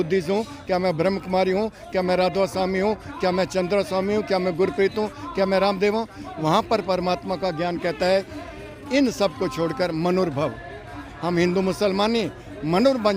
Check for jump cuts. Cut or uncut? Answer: uncut